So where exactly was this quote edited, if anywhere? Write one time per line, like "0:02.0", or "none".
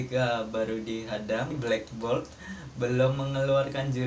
0:01.5